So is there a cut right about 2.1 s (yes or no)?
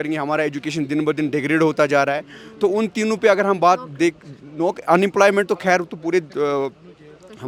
no